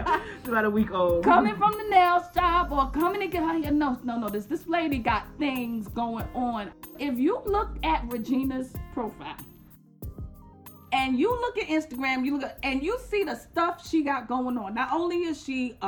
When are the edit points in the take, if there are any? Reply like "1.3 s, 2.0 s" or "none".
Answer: 6.9 s